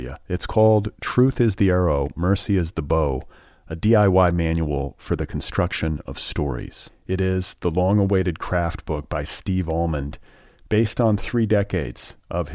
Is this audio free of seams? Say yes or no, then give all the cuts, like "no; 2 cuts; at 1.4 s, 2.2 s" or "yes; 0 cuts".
yes; 0 cuts